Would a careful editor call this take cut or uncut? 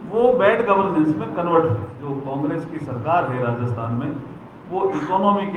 cut